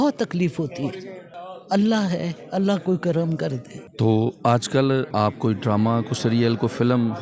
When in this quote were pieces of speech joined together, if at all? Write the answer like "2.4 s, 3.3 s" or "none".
5.1 s